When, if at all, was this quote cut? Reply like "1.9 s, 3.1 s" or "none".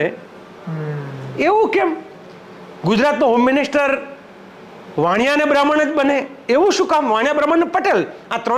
none